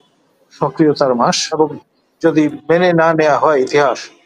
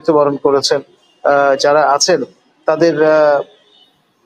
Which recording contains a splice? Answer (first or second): first